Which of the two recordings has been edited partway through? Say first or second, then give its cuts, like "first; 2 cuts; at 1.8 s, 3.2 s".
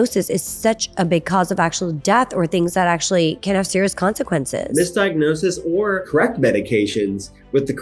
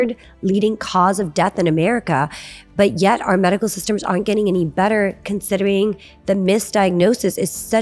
first; 2 cuts; at 4.7 s, 6.1 s